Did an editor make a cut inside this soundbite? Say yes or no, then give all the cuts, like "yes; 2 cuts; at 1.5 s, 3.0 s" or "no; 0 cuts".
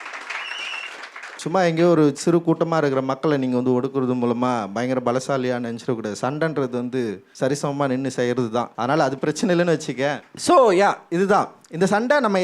yes; 4 cuts; at 1.4 s, 7.2 s, 8.7 s, 10.3 s